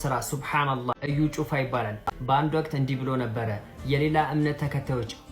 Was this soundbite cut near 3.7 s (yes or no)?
no